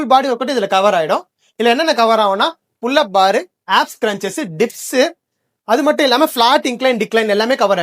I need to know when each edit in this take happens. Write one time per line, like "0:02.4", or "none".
none